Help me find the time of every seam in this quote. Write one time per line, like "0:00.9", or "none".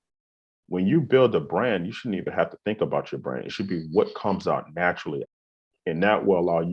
0:05.2